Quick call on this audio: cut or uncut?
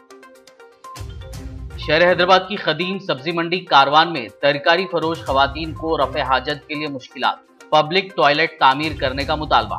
uncut